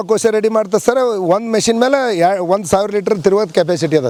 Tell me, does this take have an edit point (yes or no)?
no